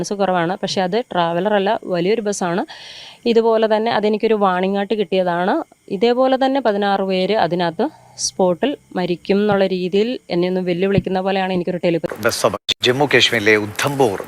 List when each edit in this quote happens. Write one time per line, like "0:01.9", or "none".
0:12.1